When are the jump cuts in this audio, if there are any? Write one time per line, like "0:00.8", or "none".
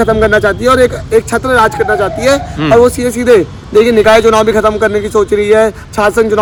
none

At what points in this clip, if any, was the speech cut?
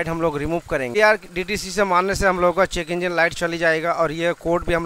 0:00.9

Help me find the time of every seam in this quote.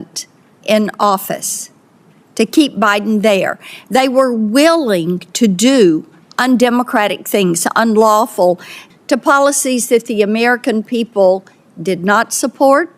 0:08.8

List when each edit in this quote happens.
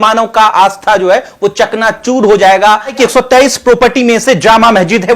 0:03.0

